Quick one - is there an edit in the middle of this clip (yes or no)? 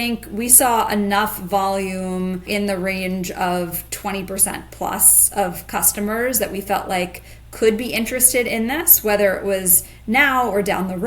yes